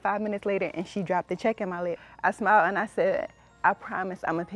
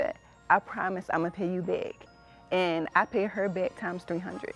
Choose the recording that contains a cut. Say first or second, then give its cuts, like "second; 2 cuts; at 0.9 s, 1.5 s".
first; 1 cut; at 2.1 s